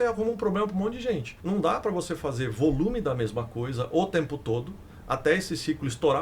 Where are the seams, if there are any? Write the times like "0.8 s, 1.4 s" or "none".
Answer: 1.3 s